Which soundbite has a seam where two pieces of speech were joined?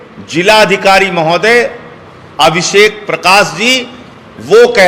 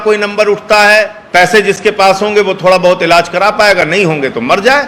second; 1 cut; at 1.2 s

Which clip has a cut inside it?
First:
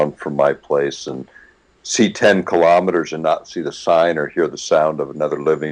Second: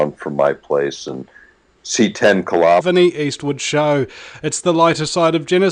first; 1 cut; at 2.8 s

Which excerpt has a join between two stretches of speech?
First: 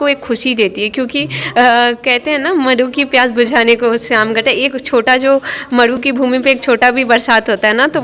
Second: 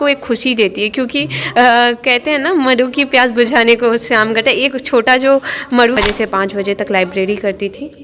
second; 1 cut; at 6.0 s

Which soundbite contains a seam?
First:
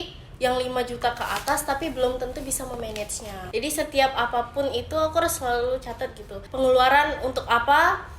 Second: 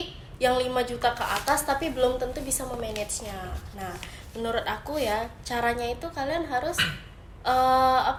first; 2 cuts; at 3.4 s, 6.4 s

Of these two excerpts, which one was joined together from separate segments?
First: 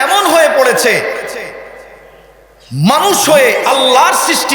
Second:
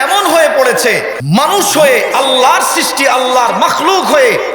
second; 1 cut; at 1.2 s

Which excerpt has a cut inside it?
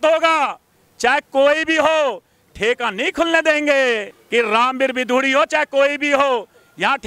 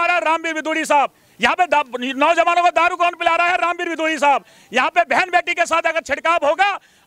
first; 1 cut; at 4.1 s

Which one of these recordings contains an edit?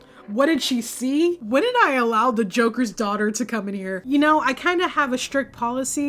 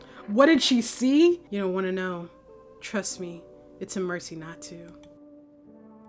first; 2 cuts; at 1.4 s, 4.0 s

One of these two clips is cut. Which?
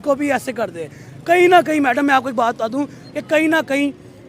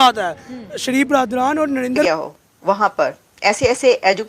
second; 1 cut; at 2.0 s

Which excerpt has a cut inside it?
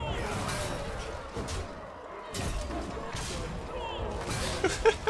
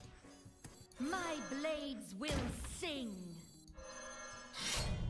second; 2 cuts; at 0.7 s, 3.6 s

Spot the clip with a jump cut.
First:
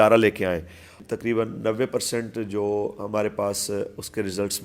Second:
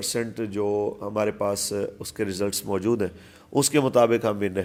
first; 1 cut; at 0.9 s

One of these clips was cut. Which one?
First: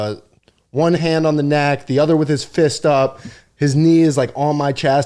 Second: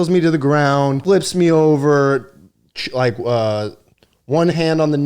second; 1 cut; at 1.0 s

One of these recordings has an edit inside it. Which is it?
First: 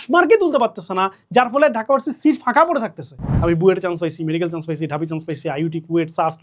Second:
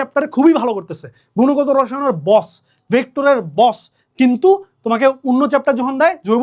first; 1 cut; at 3.3 s

